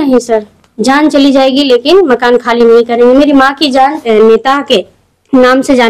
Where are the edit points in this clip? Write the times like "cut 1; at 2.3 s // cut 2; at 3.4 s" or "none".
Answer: cut 1; at 4.0 s

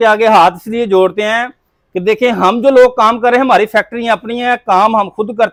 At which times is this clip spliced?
none

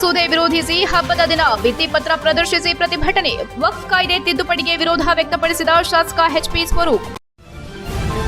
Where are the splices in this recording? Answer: cut 1; at 7.1 s

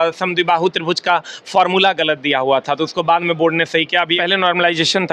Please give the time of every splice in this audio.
cut 1; at 4.2 s

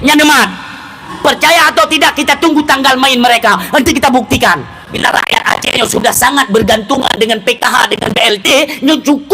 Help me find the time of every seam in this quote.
cut 1; at 1.1 s // cut 2; at 5.0 s

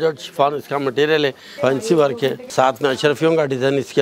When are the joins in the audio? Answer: cut 1; at 1.5 s // cut 2; at 2.4 s

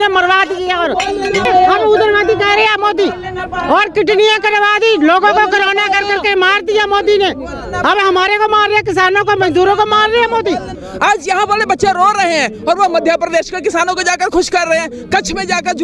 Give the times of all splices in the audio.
cut 1; at 1.5 s // cut 2; at 10.8 s

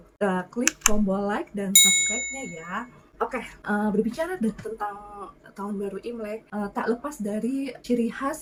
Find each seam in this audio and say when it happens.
none

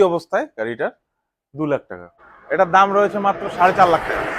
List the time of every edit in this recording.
cut 1; at 2.1 s

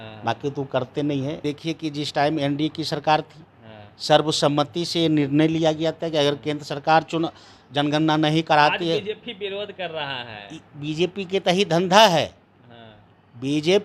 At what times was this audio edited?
cut 1; at 1.4 s

